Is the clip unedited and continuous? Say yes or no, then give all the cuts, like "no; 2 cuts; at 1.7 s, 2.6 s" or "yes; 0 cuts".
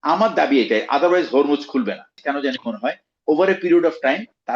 no; 1 cut; at 2.2 s